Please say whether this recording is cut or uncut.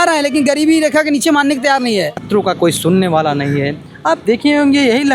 cut